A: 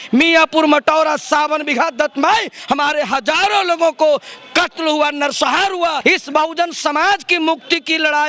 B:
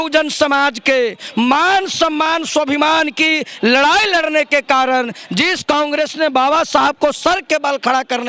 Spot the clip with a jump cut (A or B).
A